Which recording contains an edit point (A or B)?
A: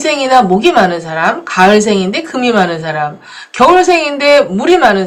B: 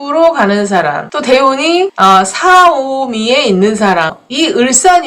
B